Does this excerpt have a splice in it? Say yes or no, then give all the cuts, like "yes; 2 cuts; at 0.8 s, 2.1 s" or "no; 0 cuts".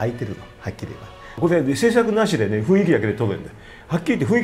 yes; 1 cut; at 1.3 s